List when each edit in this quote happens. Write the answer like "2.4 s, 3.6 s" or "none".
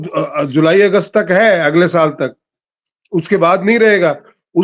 none